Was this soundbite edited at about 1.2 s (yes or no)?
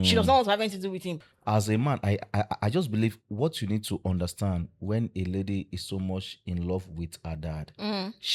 yes